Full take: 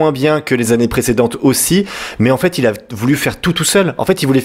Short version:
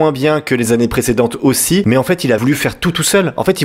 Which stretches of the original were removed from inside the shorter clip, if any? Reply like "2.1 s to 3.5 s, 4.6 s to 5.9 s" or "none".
2.2 s to 2.8 s